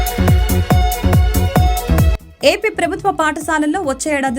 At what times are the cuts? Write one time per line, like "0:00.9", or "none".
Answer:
0:02.2